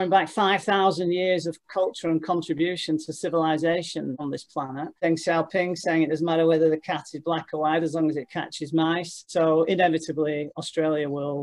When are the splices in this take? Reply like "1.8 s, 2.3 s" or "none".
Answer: 4.9 s, 9.1 s